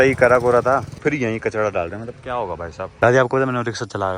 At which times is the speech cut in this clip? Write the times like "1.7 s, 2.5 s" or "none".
0.9 s, 2.8 s

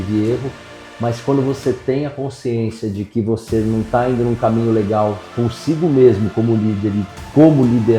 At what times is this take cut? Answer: none

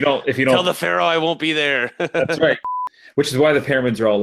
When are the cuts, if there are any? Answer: 2.7 s

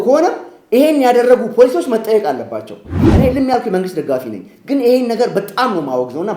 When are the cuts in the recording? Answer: 3.0 s

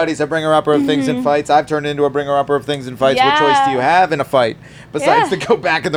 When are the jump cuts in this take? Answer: none

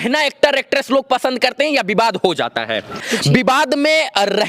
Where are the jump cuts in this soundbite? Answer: 3.1 s

